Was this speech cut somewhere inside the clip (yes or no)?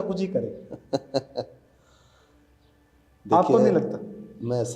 no